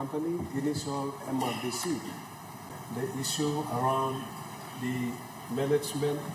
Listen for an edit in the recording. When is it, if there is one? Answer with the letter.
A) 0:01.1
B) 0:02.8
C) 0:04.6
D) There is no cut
B